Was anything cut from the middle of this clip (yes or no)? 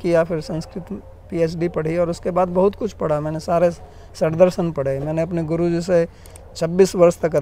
no